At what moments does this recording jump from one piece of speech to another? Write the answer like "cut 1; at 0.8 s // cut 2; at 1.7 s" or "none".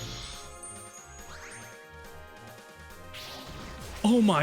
cut 1; at 3.0 s

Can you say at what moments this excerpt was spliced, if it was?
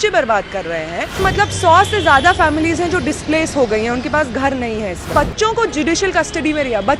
cut 1; at 1.2 s // cut 2; at 5.1 s

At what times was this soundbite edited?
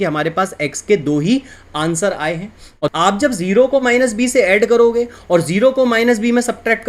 cut 1; at 2.8 s

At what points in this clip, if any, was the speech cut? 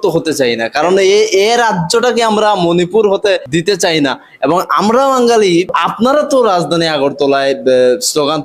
cut 1; at 3.5 s // cut 2; at 5.7 s

